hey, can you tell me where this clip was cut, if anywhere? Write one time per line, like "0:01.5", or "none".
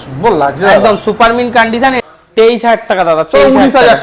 0:02.0